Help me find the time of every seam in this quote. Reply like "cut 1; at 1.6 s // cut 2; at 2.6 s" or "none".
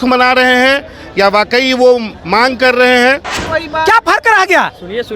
cut 1; at 3.4 s